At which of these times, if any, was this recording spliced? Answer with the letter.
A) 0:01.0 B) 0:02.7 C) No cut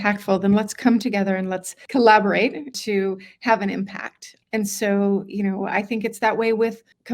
B